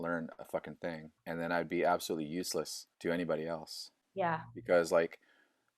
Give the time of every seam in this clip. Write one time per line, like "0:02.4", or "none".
0:01.1
0:02.8